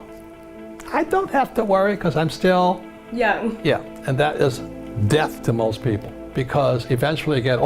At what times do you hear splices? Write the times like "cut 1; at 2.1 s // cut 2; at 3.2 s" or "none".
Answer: cut 1; at 6.1 s